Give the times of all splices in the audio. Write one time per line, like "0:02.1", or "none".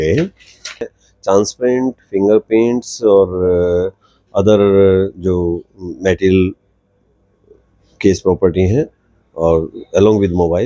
0:00.9